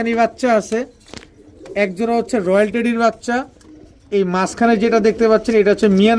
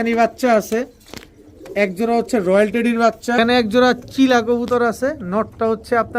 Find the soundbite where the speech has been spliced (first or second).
second